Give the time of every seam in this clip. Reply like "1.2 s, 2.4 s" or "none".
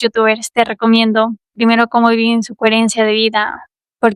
1.5 s

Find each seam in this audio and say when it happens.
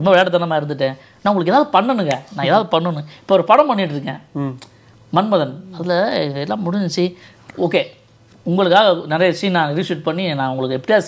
none

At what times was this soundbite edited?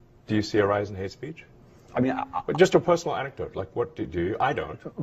none

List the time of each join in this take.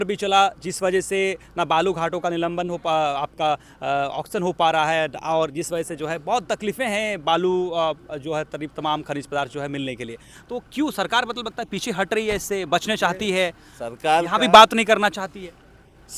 none

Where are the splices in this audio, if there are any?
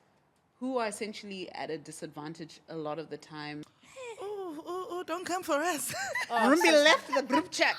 3.6 s

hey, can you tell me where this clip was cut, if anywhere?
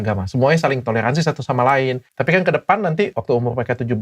2.1 s, 3.2 s

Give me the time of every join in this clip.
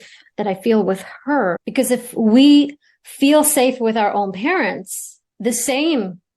1.6 s

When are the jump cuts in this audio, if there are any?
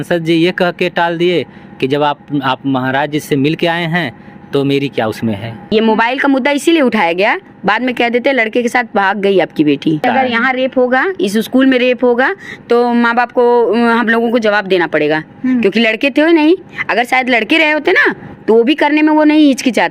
5.7 s, 10.0 s

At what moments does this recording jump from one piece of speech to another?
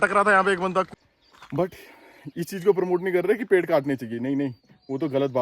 0.9 s

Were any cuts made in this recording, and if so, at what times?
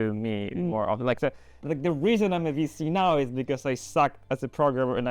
1.6 s

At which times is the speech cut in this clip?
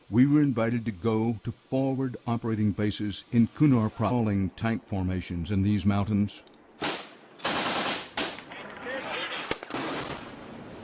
none

